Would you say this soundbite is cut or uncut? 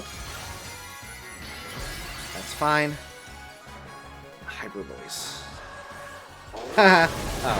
cut